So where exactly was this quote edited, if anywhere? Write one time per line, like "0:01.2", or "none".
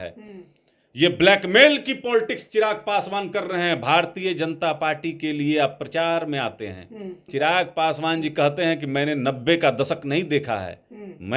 0:07.2

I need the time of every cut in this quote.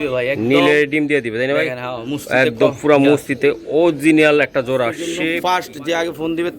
0:05.2

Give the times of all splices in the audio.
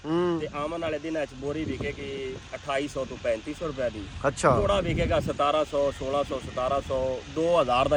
none

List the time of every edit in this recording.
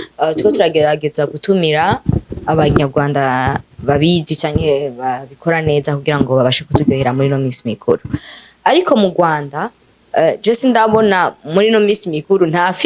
none

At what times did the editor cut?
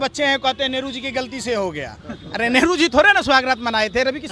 none

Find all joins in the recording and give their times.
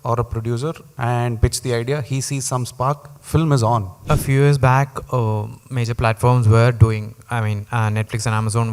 0:04.0

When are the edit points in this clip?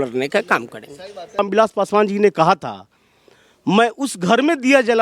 0:01.4

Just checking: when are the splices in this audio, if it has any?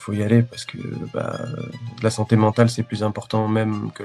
none

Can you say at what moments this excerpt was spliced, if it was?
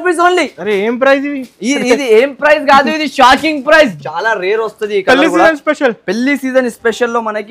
0:03.9

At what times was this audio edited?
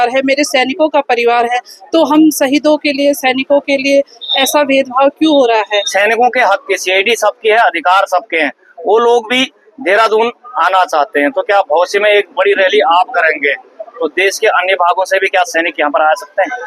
0:05.9

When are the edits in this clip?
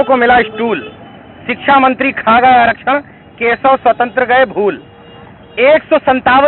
none

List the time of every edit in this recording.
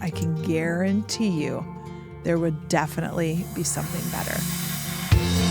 0:04.3

